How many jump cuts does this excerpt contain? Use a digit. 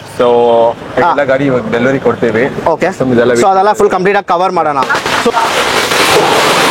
1